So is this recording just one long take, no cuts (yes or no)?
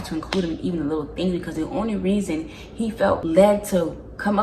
no